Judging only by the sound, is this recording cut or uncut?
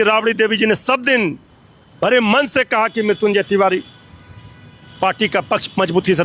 uncut